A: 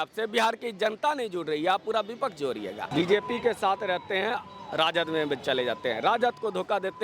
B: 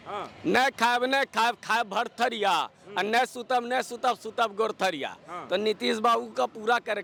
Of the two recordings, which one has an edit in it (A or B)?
A